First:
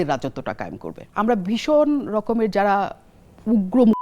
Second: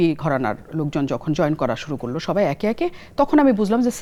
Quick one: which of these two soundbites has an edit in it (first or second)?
first